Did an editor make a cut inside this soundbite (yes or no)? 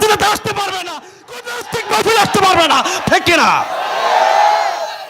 yes